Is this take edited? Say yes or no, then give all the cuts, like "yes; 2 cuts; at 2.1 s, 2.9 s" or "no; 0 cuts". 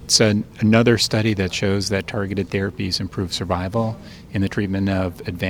no; 0 cuts